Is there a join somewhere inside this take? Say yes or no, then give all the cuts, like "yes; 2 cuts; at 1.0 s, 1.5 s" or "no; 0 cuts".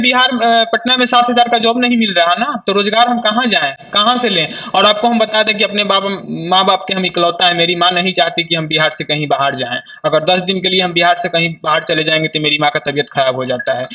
no; 0 cuts